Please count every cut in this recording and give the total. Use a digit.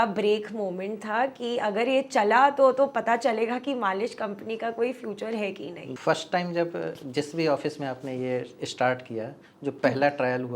1